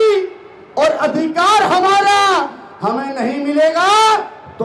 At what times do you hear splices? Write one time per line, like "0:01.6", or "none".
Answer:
none